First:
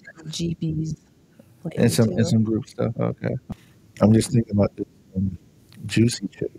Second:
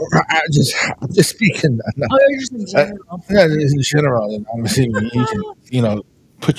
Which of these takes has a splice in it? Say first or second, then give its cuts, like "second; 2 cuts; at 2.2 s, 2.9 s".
first; 1 cut; at 3.4 s